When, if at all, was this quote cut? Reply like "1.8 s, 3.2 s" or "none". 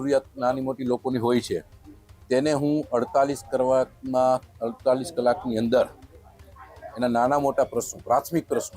none